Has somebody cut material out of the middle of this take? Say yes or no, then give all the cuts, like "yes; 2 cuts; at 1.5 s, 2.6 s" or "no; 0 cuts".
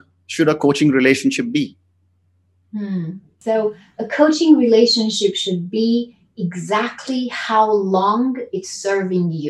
yes; 1 cut; at 3.3 s